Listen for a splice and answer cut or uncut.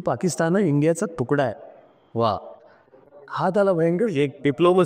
uncut